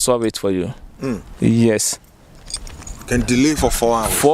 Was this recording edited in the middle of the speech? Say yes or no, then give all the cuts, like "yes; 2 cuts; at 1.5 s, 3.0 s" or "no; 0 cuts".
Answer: no; 0 cuts